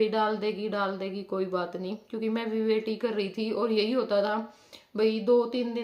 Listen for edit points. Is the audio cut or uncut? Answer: uncut